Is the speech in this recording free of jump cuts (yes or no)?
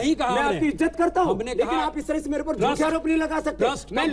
yes